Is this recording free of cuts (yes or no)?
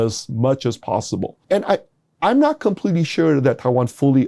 no